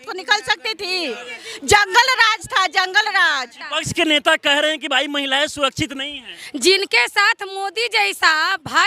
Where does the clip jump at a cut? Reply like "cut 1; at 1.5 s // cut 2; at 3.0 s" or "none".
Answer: cut 1; at 3.6 s